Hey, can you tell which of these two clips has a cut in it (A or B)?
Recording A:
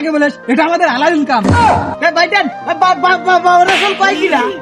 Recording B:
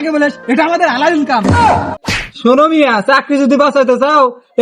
B